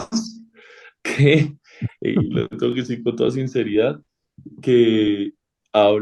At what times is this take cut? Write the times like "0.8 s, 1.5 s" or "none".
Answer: none